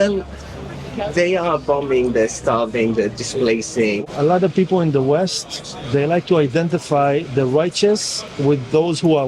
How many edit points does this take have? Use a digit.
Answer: 1